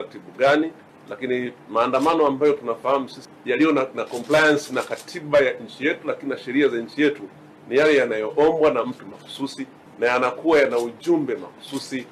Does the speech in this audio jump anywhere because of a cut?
yes; 1 cut; at 3.2 s

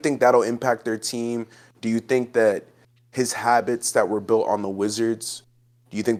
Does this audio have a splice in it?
no; 0 cuts

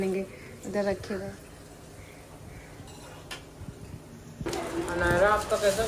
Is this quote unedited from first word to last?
no; 1 cut; at 4.5 s

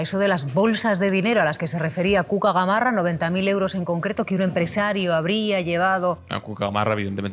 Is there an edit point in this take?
no; 0 cuts

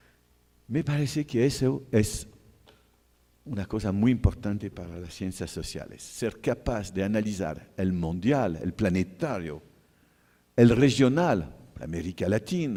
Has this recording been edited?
no; 0 cuts

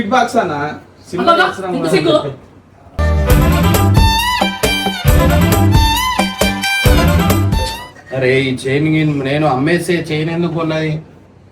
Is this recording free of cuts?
no; 1 cut; at 7.6 s

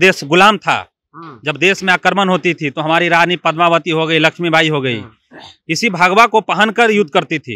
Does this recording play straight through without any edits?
yes; 0 cuts

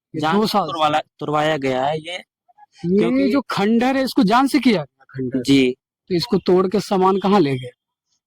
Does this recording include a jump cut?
yes; 1 cut; at 5.9 s

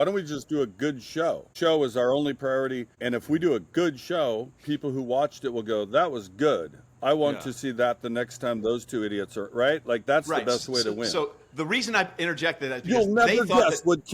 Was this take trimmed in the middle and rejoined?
yes; 2 cuts; at 1.5 s, 2.9 s

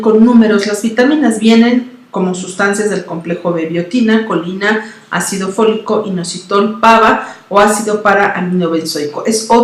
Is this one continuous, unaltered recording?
yes; 0 cuts

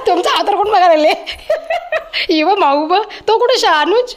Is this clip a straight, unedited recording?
yes; 0 cuts

